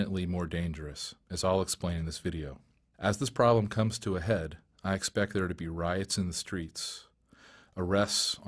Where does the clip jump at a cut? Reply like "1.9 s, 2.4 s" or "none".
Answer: none